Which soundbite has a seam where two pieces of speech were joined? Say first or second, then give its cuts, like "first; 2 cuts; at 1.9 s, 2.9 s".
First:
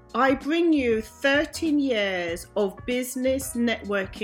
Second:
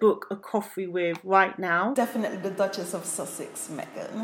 second; 1 cut; at 1.9 s